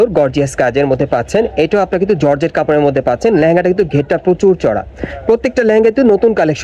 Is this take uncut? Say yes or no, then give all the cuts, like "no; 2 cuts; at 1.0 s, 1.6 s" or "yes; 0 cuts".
yes; 0 cuts